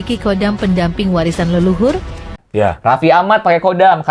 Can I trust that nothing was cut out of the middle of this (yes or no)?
no